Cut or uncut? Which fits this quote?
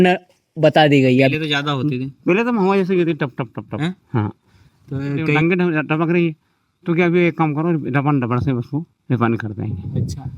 cut